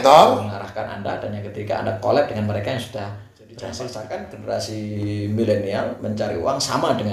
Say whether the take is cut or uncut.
cut